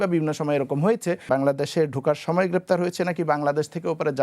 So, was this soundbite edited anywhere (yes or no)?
yes